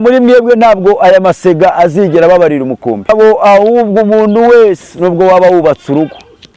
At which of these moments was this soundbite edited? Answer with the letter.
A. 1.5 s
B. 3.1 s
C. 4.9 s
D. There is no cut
B